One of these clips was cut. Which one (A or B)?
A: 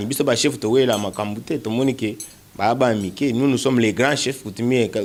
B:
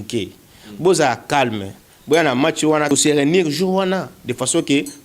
B